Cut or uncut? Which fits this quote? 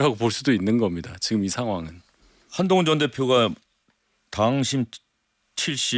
uncut